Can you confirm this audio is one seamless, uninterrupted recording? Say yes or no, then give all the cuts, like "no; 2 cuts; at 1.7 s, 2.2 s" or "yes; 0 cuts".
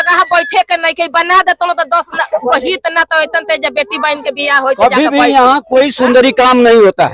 yes; 0 cuts